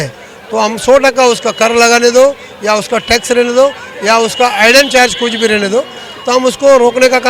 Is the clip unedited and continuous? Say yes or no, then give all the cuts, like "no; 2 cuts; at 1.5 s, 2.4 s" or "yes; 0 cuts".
yes; 0 cuts